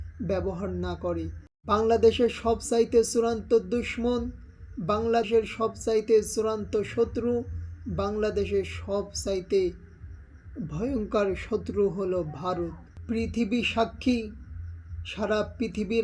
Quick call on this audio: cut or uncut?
cut